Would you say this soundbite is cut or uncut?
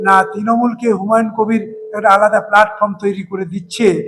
uncut